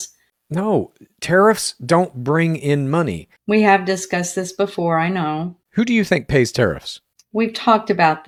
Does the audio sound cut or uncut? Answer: uncut